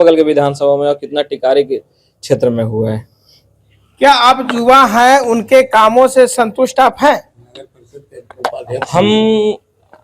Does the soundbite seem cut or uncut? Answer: uncut